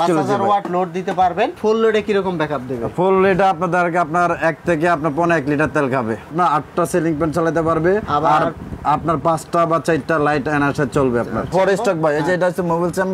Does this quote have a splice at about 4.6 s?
no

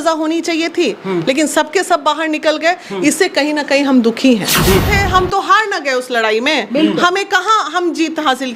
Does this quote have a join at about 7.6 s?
no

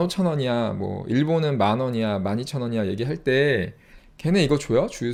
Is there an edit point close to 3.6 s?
no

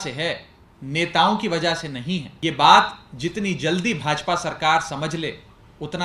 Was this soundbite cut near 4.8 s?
no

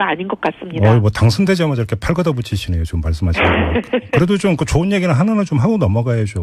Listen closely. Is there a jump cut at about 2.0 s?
no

